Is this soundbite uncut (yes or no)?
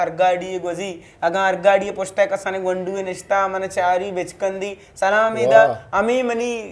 yes